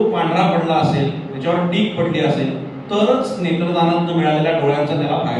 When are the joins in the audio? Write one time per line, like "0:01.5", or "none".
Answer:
none